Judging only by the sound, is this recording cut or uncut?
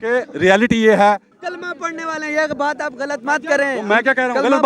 cut